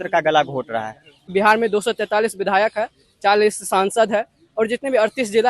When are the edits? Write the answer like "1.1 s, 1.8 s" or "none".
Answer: 1.3 s